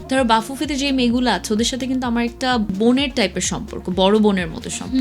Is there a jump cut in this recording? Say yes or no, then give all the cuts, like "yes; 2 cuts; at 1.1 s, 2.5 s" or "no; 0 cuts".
yes; 1 cut; at 2.7 s